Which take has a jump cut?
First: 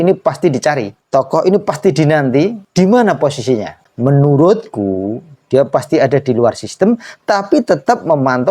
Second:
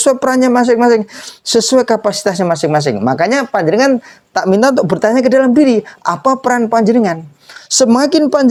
first; 3 cuts; at 0.9 s, 2.6 s, 3.9 s

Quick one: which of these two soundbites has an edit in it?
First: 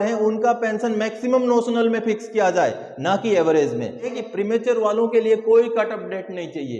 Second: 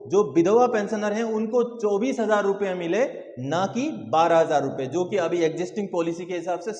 first; 1 cut; at 4.1 s

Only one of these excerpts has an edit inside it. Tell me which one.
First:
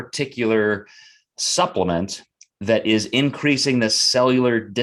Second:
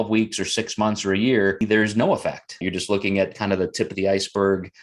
second; 2 cuts; at 1.6 s, 2.6 s

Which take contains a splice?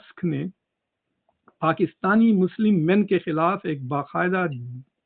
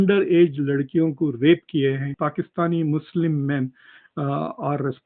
second; 1 cut; at 2.2 s

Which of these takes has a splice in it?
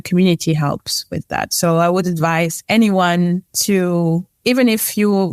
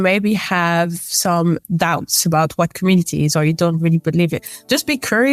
first; 3 cuts; at 2.6 s, 3.5 s, 4.3 s

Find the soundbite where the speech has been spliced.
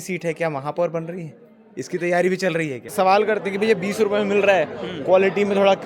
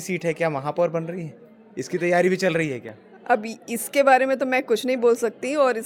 first; 1 cut; at 2.9 s

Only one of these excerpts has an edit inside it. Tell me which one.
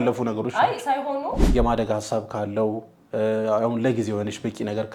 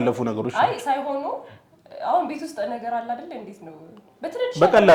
first; 1 cut; at 1.4 s

